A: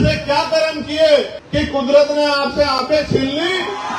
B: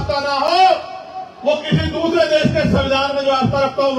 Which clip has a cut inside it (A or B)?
A